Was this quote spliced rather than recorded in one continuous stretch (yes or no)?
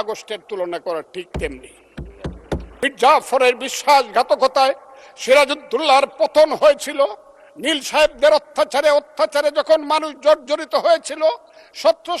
yes